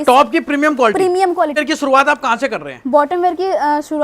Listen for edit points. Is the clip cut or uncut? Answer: cut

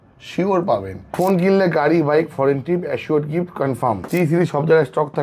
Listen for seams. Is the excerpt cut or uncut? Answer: cut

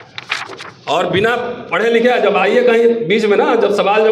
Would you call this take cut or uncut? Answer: uncut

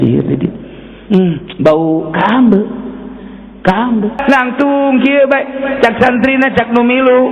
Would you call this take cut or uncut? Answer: cut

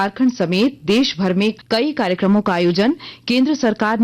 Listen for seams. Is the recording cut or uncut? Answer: cut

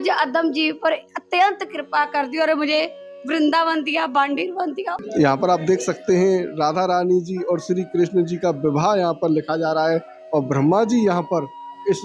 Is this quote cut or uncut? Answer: cut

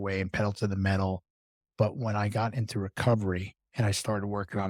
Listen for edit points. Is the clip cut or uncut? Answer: uncut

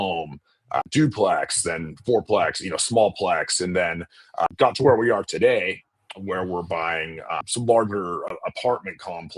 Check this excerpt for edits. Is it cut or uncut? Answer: cut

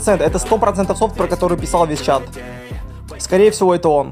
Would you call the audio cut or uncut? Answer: uncut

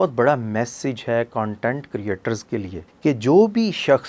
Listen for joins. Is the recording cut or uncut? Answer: cut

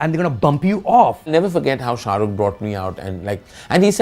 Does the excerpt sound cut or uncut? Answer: cut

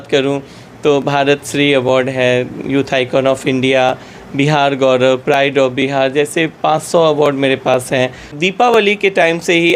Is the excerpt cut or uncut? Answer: cut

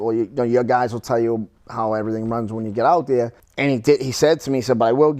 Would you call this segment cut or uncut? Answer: cut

